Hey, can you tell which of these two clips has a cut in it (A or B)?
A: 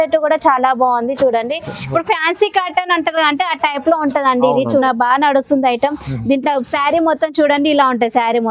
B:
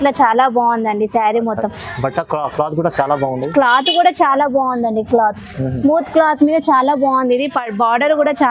A